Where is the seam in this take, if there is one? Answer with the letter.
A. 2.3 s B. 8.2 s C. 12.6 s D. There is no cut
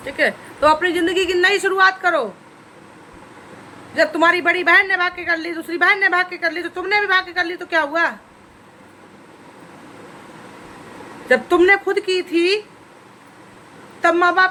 D